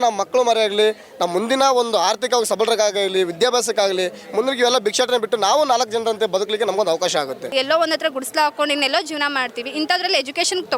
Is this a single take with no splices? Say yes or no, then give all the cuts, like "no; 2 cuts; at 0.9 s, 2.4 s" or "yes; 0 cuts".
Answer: no; 1 cut; at 7.5 s